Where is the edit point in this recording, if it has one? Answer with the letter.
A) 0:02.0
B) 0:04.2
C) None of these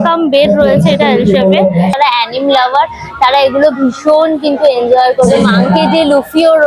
A